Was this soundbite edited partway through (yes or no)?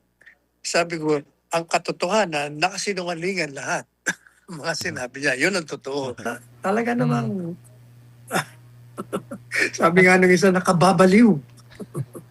yes